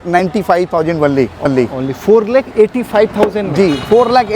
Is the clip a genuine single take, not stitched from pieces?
no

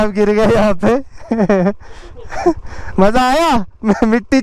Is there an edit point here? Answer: no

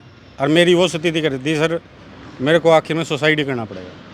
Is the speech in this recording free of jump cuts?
yes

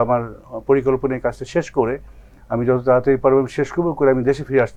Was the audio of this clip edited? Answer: no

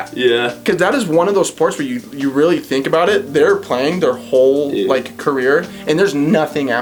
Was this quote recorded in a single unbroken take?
yes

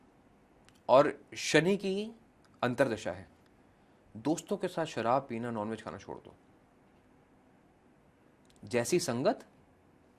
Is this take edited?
no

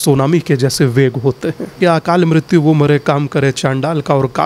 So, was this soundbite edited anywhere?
yes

